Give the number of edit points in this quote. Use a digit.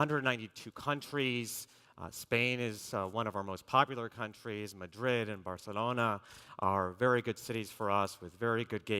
1